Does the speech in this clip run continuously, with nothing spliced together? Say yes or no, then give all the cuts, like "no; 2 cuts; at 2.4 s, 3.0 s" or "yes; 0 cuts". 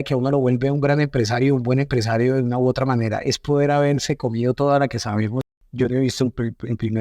no; 1 cut; at 5.4 s